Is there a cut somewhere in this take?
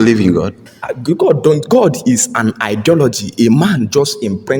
no; 0 cuts

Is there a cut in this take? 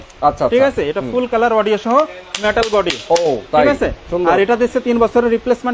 no; 0 cuts

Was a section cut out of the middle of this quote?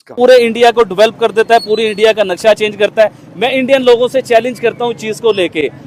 no; 0 cuts

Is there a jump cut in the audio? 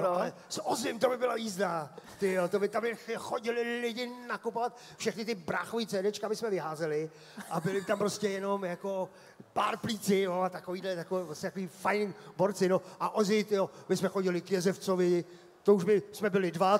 no; 0 cuts

